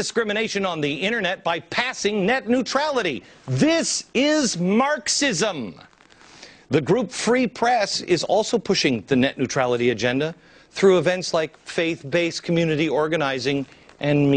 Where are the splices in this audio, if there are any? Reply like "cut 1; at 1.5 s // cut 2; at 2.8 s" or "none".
cut 1; at 13.2 s